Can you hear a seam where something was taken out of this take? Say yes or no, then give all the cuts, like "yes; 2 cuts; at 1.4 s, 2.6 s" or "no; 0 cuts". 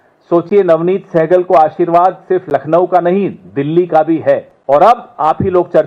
yes; 1 cut; at 4.5 s